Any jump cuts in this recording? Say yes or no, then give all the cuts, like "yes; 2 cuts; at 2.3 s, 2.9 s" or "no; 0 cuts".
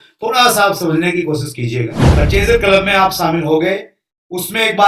yes; 1 cut; at 2.0 s